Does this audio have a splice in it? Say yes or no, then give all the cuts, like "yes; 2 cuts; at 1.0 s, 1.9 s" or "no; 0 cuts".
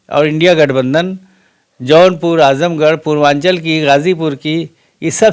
no; 0 cuts